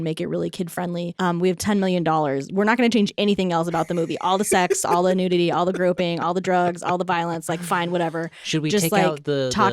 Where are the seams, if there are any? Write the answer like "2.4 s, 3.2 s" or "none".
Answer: 1.1 s